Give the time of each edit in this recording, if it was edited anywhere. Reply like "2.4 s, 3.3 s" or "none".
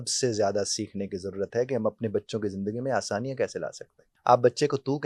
4.1 s